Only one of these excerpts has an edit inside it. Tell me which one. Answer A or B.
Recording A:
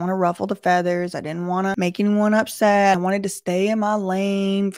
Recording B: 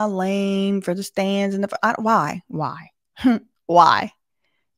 A